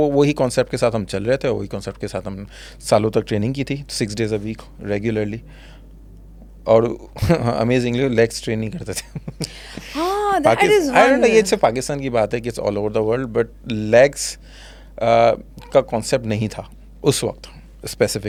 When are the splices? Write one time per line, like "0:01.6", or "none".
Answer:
none